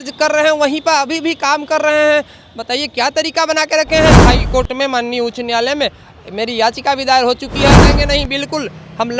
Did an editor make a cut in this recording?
yes; 2 cuts; at 4.2 s, 7.9 s

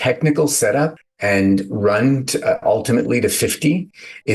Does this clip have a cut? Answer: yes; 1 cut; at 1.1 s

